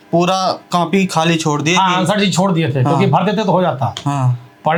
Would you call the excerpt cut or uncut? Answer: uncut